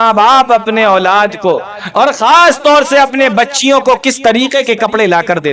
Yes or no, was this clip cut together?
no